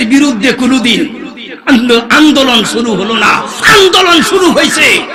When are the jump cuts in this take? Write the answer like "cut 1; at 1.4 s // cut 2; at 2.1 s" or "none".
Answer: none